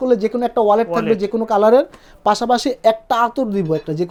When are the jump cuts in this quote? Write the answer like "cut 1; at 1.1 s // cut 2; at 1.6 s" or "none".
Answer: none